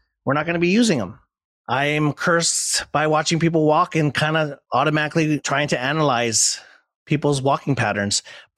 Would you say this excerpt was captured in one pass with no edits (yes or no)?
no